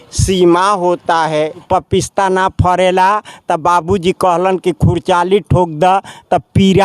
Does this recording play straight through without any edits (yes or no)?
no